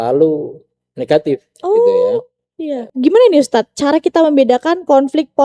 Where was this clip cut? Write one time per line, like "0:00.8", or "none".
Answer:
0:02.9

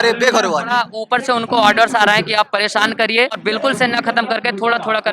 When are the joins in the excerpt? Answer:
0:00.9
0:03.4

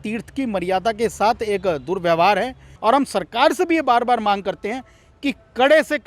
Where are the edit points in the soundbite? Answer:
0:02.7

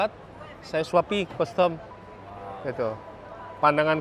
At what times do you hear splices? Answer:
none

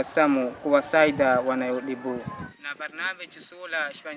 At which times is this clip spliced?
0:02.5

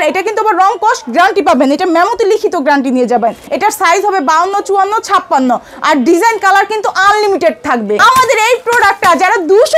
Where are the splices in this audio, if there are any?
0:03.5
0:08.0

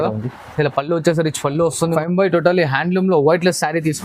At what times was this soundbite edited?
0:02.0

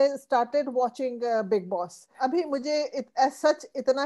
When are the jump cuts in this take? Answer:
0:02.0

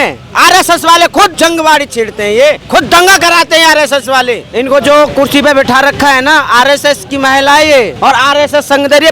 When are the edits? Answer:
0:01.3
0:02.6
0:04.4
0:07.9

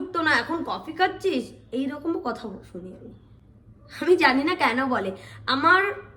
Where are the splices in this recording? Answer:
none

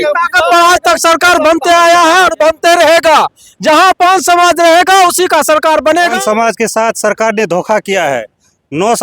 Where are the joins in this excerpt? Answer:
0:06.1

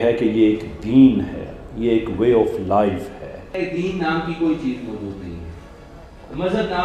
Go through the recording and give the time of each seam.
0:03.6

